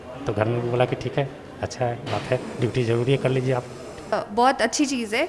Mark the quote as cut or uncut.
cut